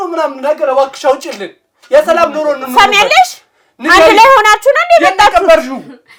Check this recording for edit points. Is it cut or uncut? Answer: uncut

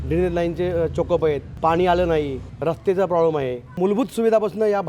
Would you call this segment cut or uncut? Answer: cut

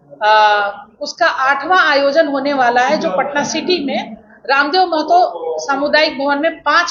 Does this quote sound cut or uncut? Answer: uncut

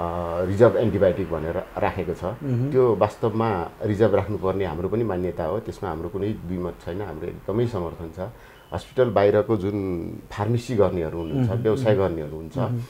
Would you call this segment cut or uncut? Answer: cut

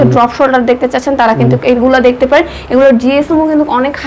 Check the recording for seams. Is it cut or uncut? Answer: uncut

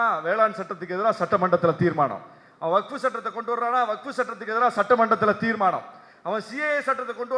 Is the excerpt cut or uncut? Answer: uncut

